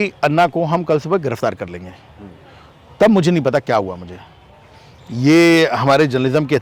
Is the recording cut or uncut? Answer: uncut